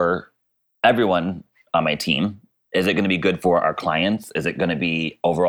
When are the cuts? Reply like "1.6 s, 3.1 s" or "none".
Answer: none

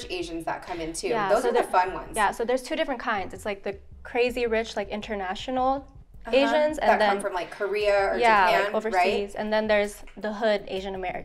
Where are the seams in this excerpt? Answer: none

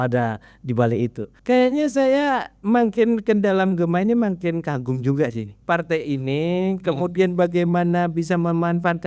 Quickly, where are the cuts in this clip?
1.3 s, 5.5 s

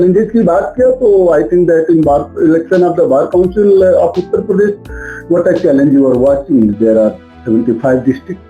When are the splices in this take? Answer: none

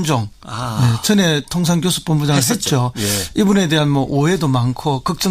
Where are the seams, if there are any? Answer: 2.6 s

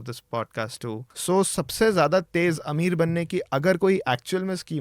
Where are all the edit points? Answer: 1.1 s

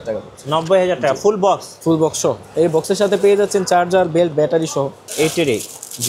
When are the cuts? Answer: 5.0 s

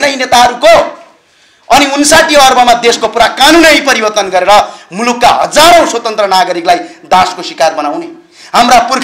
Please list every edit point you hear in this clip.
none

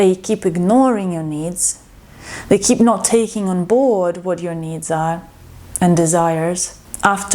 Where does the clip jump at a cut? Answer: none

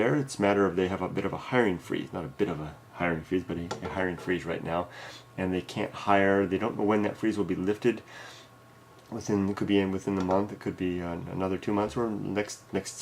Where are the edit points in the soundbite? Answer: 3.8 s

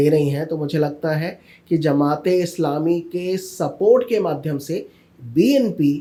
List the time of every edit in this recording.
none

